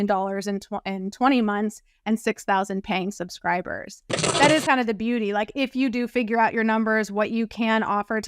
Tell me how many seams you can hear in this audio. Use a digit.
1